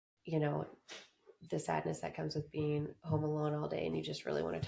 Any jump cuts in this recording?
no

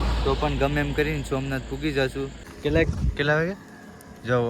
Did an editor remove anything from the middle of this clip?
yes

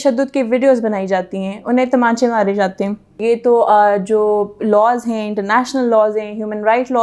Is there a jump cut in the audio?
yes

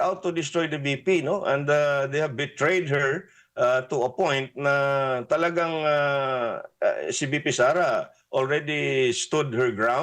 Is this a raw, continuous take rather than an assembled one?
yes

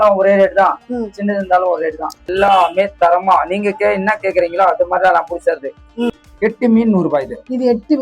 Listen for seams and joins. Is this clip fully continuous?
no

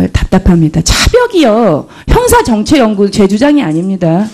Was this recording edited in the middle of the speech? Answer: yes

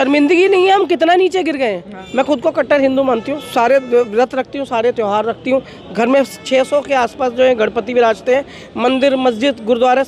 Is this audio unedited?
no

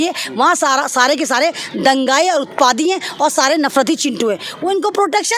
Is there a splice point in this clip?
no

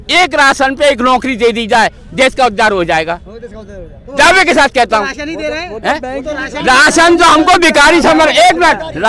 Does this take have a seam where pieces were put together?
no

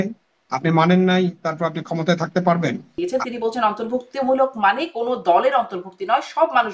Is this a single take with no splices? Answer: no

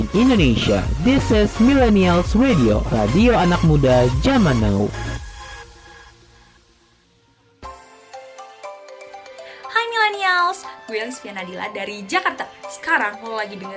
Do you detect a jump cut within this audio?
yes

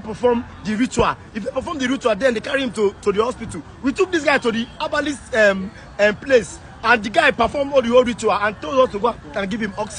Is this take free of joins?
yes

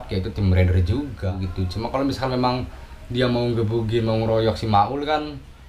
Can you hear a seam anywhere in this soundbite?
yes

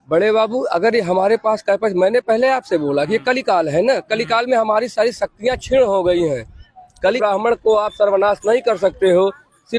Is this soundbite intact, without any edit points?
no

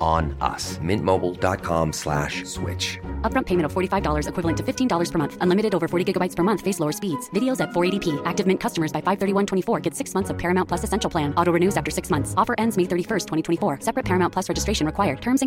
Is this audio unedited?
yes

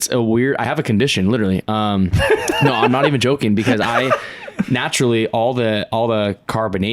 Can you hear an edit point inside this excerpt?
no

